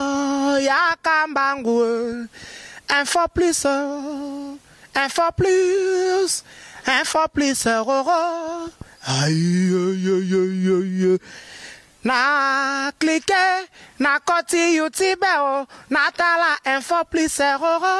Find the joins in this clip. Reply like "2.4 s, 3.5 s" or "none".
none